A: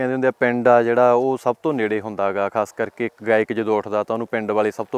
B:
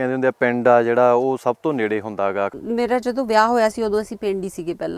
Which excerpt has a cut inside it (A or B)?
B